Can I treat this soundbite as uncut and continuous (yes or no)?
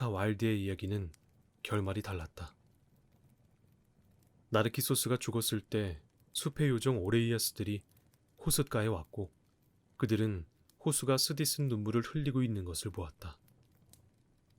no